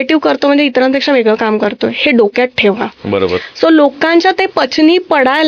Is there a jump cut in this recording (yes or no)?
no